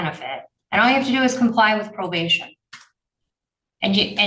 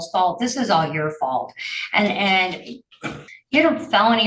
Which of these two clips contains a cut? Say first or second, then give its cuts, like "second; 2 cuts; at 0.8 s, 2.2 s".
second; 1 cut; at 3.2 s